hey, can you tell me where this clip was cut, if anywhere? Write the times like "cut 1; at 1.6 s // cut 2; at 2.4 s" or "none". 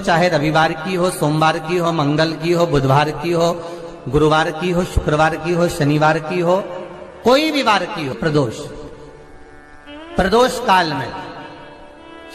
cut 1; at 8.2 s